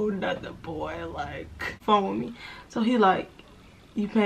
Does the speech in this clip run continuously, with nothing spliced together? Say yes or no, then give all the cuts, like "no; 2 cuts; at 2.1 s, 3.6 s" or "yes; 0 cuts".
no; 1 cut; at 1.8 s